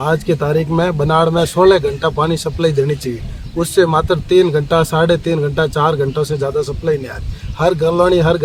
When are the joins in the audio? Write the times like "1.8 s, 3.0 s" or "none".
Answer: none